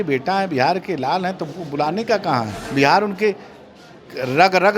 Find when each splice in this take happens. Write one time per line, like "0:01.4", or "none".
0:02.6